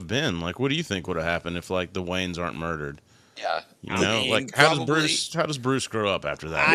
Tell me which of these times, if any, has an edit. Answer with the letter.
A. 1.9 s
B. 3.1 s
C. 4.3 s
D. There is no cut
D